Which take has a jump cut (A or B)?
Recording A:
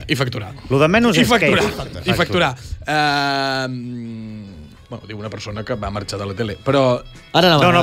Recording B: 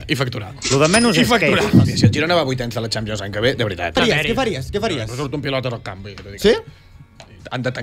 B